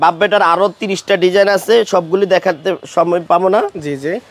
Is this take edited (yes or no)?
no